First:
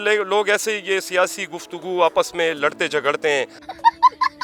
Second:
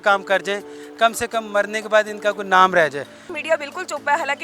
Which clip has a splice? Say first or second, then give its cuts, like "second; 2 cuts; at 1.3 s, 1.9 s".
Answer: second; 1 cut; at 3.4 s